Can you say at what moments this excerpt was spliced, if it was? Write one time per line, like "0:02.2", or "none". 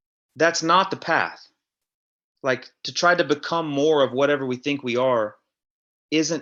none